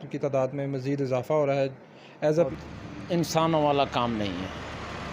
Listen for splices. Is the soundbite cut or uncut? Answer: cut